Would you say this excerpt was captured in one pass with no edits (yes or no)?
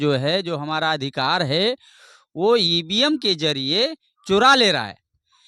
yes